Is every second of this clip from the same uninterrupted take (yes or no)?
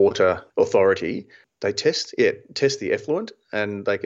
yes